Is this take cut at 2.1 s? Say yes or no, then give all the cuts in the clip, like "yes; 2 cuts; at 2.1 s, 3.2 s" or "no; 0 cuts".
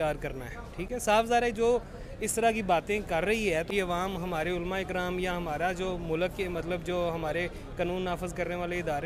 no; 1 cut; at 3.7 s